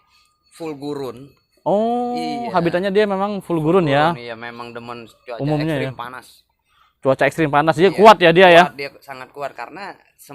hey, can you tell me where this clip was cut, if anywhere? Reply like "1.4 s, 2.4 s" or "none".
none